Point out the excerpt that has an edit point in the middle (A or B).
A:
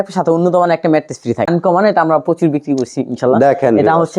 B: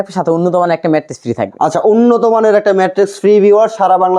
A